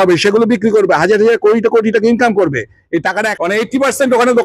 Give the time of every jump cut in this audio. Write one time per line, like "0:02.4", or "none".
0:03.3